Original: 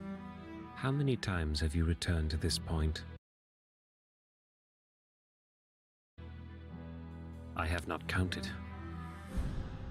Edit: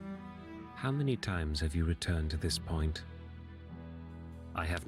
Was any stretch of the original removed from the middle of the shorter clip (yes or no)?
yes